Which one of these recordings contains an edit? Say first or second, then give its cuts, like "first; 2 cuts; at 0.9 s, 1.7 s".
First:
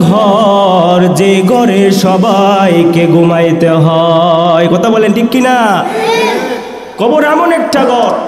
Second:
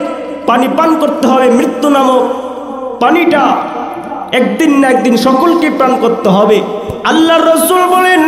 second; 1 cut; at 6.9 s